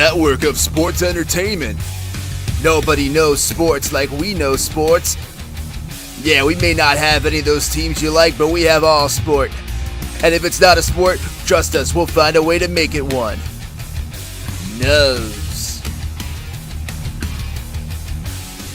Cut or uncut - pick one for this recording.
uncut